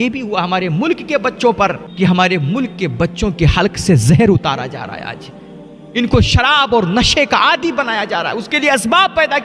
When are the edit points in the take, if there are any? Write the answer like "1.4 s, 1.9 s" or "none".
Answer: none